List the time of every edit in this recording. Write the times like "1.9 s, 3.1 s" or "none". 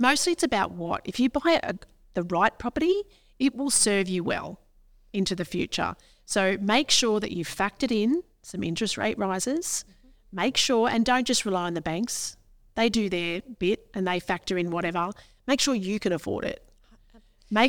none